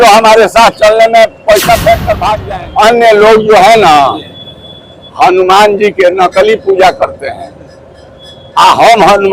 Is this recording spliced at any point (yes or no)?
yes